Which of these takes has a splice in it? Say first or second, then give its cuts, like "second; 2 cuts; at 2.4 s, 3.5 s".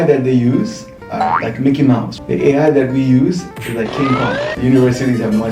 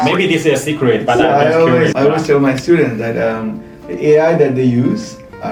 first; 1 cut; at 2.1 s